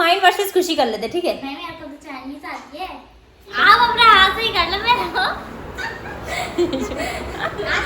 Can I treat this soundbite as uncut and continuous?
no; 1 cut; at 3.5 s

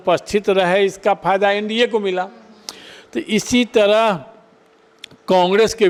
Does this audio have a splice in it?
no; 0 cuts

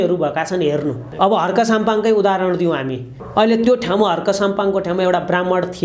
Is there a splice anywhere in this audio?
yes; 2 cuts; at 1.0 s, 3.2 s

